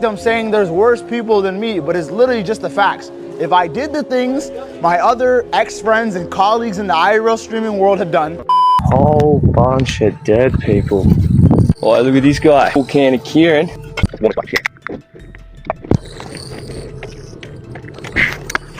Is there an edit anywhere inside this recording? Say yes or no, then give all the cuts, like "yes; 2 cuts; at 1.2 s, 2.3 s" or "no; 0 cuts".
yes; 3 cuts; at 8.7 s, 12.8 s, 13.8 s